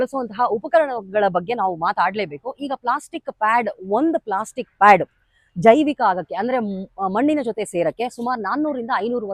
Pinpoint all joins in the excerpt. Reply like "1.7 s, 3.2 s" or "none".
none